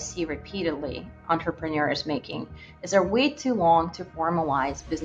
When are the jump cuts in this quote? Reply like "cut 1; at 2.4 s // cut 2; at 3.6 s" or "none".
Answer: none